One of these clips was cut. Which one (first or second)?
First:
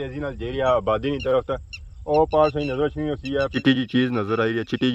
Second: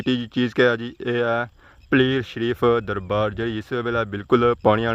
first